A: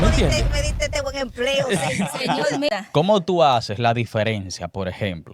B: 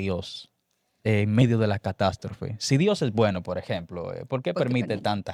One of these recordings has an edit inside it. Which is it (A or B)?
A